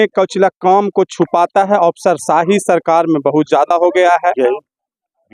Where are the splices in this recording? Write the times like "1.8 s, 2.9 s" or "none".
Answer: 4.4 s